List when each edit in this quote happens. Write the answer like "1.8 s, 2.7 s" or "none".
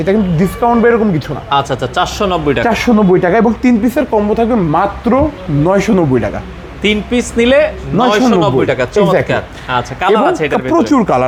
none

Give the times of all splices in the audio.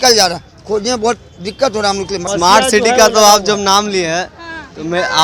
2.2 s

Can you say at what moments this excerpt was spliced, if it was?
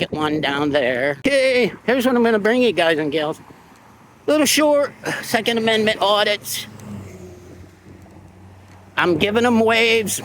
1.2 s, 5.8 s

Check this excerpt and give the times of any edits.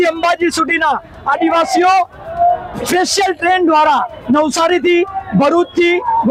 none

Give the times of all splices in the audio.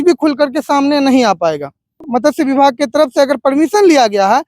2.1 s

